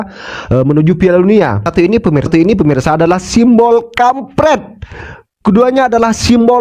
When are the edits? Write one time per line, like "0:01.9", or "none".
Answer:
0:01.6